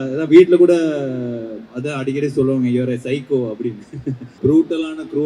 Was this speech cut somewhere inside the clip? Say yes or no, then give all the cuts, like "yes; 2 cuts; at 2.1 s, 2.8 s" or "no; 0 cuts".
yes; 1 cut; at 4.3 s